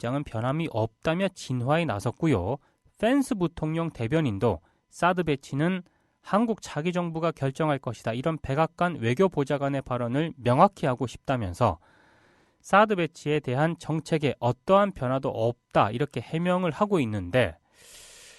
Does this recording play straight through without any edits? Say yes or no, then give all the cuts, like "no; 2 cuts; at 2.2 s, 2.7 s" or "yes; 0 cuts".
no; 1 cut; at 3.9 s